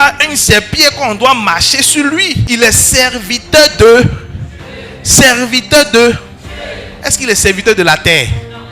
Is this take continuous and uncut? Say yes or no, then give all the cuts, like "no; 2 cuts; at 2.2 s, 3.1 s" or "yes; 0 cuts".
no; 1 cut; at 2.4 s